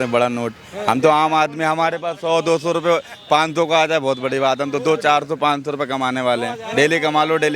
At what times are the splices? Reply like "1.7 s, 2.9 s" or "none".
none